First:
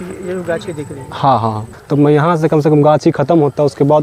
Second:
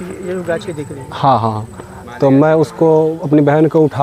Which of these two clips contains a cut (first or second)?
first